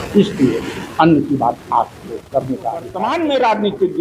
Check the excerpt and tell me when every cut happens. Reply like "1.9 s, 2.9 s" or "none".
3.0 s